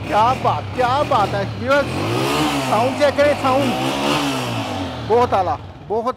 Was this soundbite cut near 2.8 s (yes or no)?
no